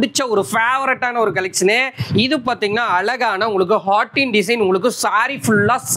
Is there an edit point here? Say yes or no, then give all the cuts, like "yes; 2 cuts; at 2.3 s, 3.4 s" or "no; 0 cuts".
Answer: no; 0 cuts